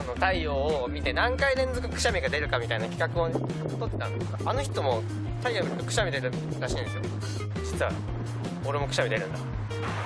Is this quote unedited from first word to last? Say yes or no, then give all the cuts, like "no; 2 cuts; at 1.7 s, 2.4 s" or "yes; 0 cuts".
no; 1 cut; at 7.4 s